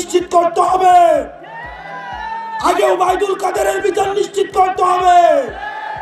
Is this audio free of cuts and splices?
yes; 0 cuts

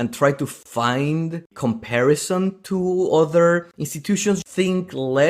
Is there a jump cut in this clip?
yes; 1 cut; at 4.4 s

